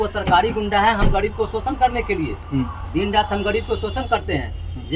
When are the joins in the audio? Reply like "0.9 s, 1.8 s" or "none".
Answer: none